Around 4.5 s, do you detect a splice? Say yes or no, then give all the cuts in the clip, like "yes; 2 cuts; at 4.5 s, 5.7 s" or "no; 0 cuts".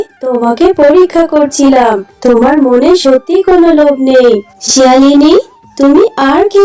yes; 1 cut; at 4.5 s